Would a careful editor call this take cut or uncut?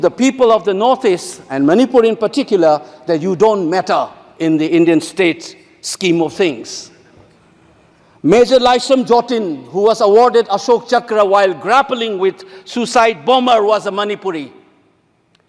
uncut